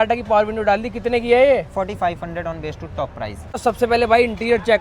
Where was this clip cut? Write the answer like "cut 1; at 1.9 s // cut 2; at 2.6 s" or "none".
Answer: cut 1; at 3.6 s